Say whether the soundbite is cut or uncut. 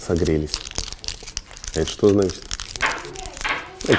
uncut